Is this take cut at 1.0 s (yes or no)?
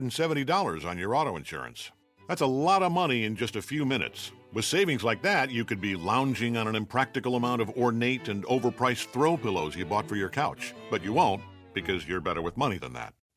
no